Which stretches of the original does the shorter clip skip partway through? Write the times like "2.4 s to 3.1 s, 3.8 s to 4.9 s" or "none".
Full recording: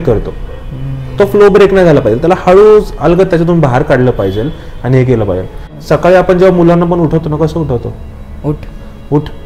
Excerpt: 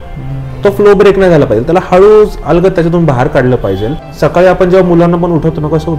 4.5 s to 5.7 s